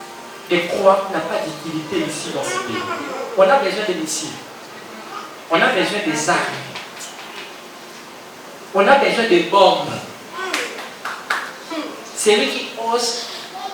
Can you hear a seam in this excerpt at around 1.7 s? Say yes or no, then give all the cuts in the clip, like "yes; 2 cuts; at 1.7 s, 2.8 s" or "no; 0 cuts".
no; 0 cuts